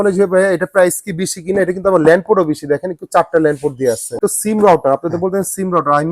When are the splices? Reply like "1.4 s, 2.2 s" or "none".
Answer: 4.2 s